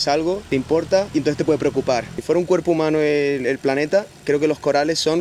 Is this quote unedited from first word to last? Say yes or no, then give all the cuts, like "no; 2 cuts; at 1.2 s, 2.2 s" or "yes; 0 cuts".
no; 2 cuts; at 1.0 s, 2.1 s